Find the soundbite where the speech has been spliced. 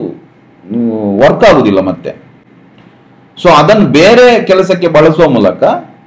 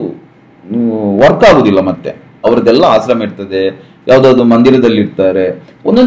second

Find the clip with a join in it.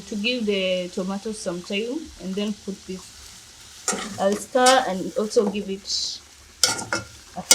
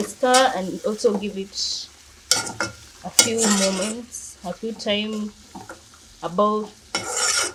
first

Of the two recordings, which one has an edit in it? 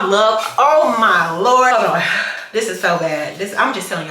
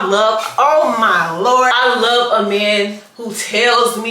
second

